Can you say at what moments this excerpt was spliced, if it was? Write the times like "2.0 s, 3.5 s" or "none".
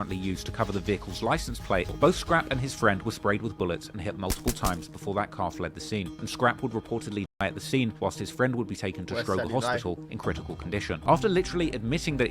1.9 s, 11.0 s